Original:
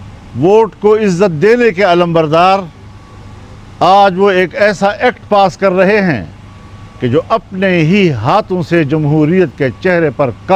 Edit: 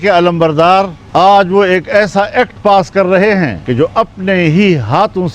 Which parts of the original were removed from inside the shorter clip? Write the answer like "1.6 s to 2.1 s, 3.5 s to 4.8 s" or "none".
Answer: 2.7 s to 3.6 s, 6.2 s to 6.9 s